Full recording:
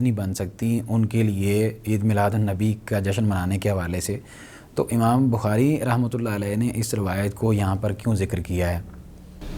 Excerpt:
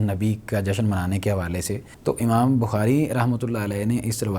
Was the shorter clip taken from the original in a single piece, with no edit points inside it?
no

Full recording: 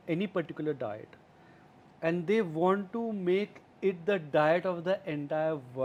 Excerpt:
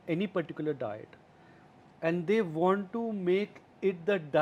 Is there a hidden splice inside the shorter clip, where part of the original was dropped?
no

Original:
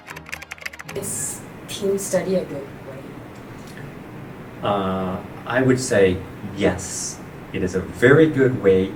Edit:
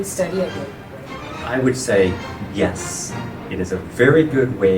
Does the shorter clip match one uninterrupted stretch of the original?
no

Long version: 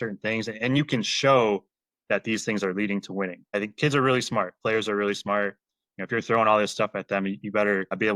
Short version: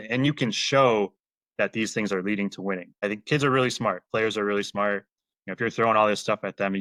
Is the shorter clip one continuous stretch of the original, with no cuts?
yes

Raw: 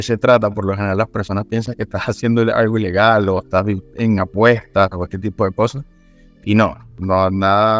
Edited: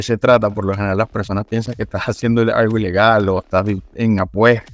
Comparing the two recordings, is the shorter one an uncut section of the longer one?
yes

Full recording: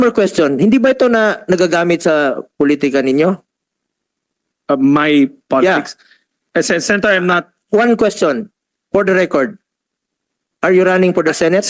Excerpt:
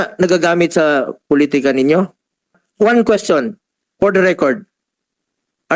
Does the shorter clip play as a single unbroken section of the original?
no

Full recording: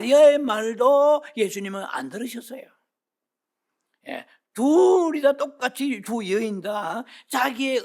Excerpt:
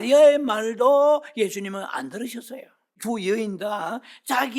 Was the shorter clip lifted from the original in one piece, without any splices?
no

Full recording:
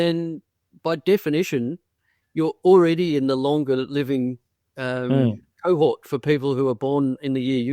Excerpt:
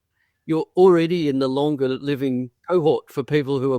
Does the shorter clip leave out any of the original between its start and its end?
yes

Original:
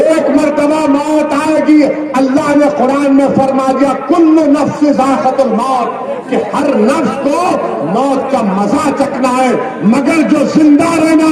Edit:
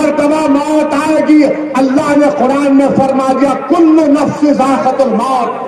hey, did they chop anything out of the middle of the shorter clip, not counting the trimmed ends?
no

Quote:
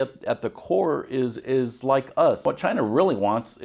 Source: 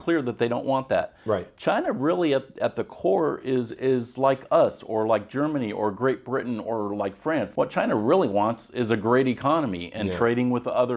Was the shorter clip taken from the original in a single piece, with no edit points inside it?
no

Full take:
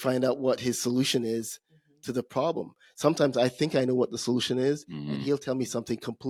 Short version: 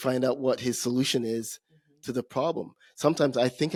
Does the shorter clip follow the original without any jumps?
yes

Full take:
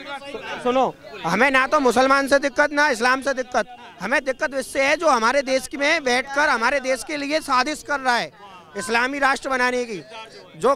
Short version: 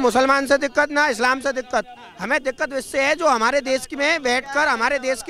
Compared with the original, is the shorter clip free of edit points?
yes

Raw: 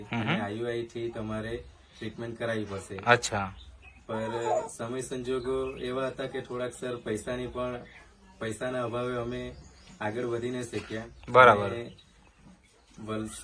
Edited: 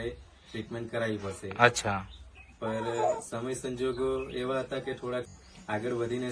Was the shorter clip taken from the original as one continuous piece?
no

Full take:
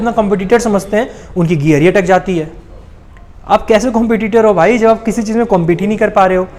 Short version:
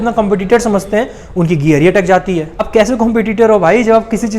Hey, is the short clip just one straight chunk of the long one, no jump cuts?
no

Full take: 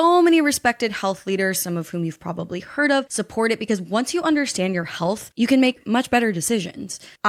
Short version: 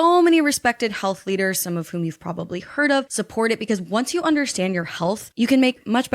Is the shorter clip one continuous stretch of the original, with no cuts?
yes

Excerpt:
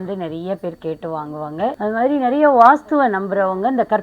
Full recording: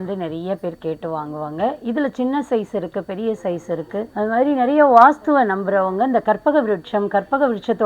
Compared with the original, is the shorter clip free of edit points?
no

